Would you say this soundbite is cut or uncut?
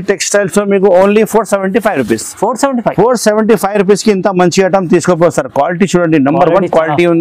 uncut